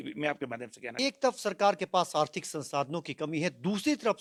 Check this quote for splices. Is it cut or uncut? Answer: uncut